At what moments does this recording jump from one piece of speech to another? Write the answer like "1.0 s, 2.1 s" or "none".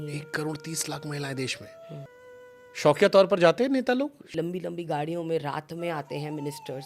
2.1 s, 4.2 s